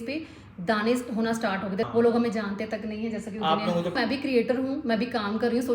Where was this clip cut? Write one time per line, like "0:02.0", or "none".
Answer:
0:01.9
0:04.0